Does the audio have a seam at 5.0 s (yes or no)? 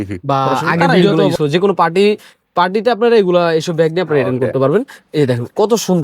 no